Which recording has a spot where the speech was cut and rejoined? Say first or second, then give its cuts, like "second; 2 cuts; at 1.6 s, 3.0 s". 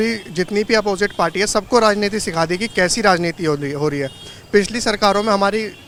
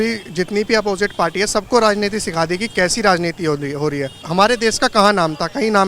second; 1 cut; at 4.1 s